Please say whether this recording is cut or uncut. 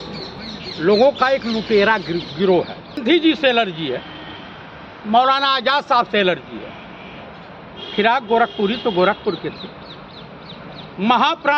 cut